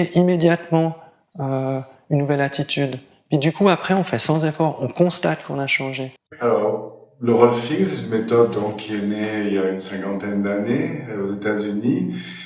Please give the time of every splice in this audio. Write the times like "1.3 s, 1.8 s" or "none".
none